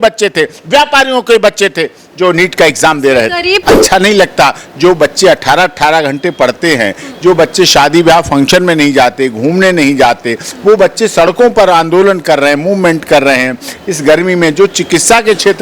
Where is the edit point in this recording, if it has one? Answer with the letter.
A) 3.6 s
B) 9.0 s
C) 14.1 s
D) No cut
A